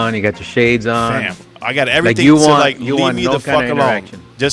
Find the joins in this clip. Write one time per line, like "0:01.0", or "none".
none